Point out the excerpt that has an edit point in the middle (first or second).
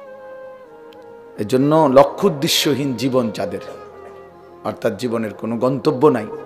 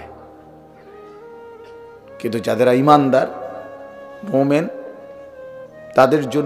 first